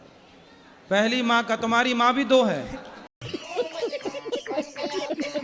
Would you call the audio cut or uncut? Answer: uncut